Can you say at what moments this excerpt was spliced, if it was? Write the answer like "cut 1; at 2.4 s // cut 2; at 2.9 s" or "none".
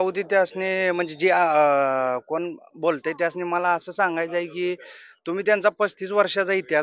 none